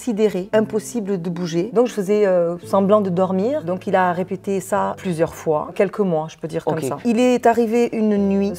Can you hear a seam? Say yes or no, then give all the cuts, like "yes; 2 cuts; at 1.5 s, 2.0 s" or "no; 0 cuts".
no; 0 cuts